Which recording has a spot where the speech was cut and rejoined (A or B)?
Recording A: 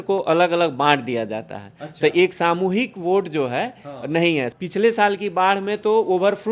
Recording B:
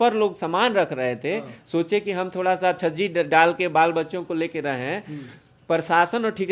A